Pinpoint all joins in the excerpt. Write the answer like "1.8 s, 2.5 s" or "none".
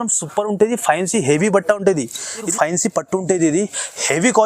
2.5 s